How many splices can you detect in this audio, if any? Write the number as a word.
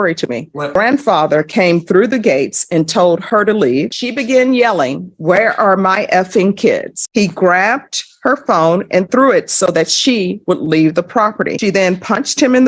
four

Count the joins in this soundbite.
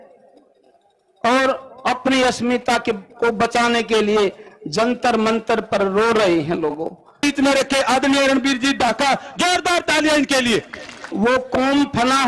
two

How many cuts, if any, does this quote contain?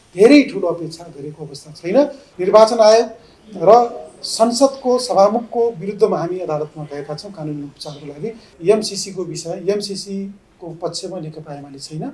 two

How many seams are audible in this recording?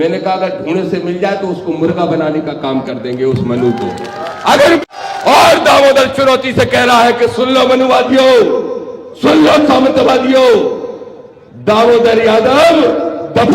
one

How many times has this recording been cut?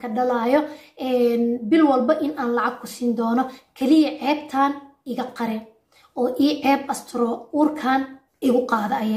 one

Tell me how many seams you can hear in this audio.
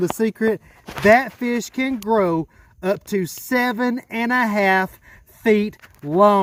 zero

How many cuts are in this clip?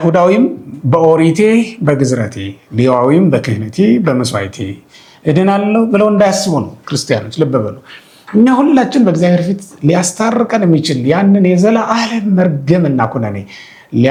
zero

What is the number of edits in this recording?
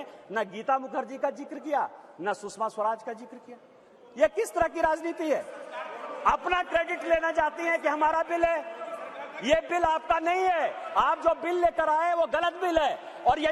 zero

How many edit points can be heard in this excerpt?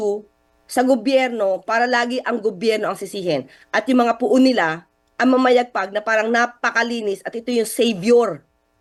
zero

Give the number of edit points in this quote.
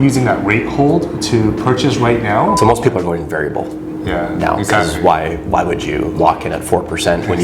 one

